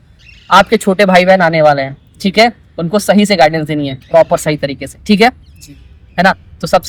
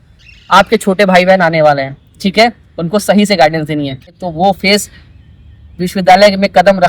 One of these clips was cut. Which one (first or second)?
second